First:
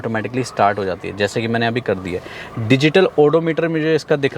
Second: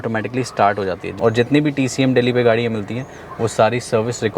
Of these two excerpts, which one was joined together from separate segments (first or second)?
second